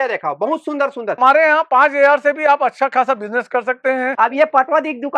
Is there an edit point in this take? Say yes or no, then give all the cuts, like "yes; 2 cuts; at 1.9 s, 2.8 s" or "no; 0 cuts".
yes; 2 cuts; at 1.2 s, 4.1 s